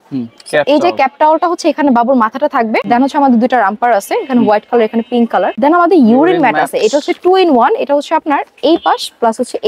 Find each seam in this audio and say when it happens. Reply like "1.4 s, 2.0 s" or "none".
2.8 s, 5.5 s